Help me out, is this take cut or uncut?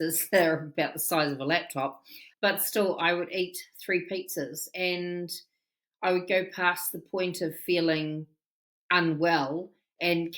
cut